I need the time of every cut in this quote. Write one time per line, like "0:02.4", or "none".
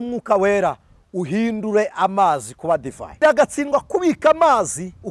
0:03.2

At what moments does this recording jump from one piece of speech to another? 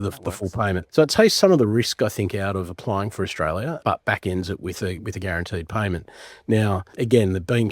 none

